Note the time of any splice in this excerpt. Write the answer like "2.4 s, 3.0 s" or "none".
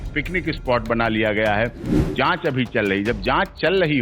2.1 s